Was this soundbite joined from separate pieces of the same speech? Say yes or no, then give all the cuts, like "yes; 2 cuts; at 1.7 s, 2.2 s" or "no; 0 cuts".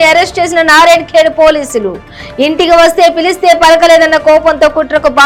no; 0 cuts